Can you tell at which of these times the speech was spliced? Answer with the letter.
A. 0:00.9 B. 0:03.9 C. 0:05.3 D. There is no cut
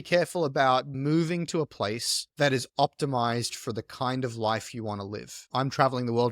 A